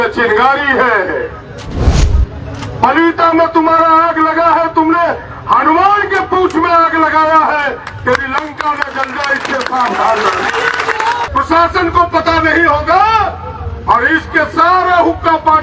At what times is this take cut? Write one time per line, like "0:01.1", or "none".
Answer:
0:11.2